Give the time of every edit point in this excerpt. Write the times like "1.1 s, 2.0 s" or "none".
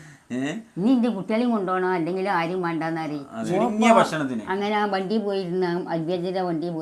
3.4 s